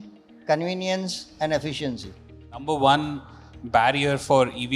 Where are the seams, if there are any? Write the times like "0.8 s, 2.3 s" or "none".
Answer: 2.6 s